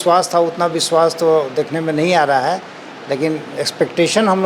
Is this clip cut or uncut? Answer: uncut